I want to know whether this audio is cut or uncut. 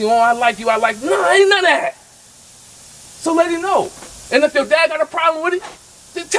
uncut